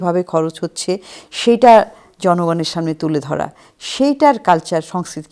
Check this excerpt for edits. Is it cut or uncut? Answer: uncut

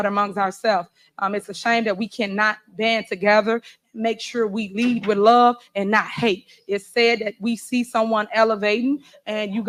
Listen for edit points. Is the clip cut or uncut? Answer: uncut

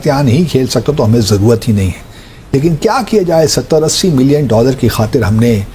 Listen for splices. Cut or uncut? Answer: uncut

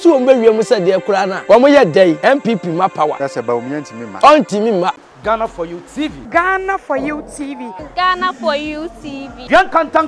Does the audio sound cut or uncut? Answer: cut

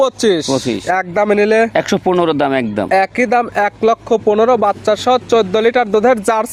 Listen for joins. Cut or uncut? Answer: uncut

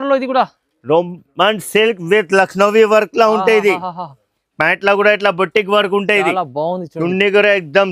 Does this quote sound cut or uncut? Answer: uncut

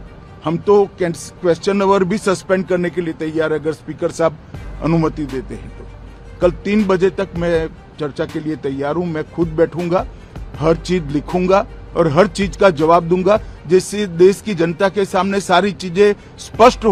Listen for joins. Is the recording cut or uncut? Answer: uncut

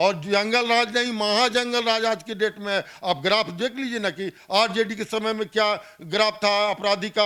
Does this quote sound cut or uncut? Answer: uncut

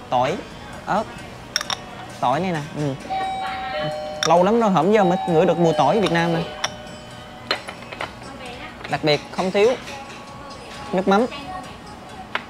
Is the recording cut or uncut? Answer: uncut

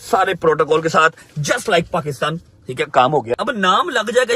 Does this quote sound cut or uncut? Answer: cut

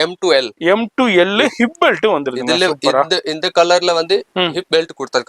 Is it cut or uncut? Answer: uncut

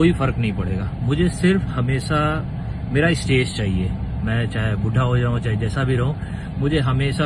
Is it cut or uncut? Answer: uncut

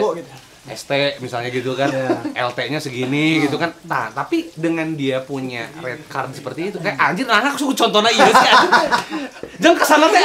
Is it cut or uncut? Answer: uncut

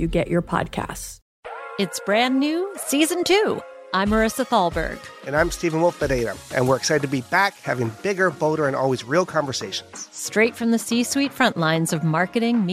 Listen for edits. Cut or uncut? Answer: cut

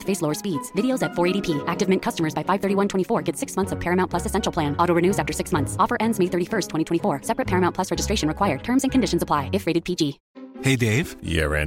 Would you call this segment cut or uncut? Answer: uncut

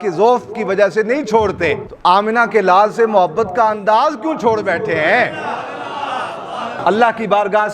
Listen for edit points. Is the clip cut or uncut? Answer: cut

